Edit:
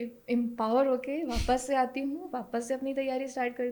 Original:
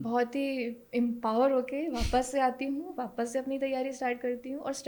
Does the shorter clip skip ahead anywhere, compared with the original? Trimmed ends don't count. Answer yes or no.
no